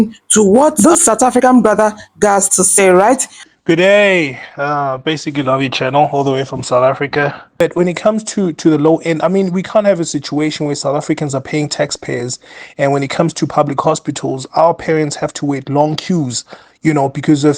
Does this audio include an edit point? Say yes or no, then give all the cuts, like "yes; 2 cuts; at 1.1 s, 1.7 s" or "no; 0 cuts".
yes; 1 cut; at 7.6 s